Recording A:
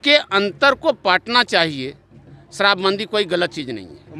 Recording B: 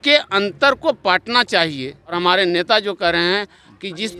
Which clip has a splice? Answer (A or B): B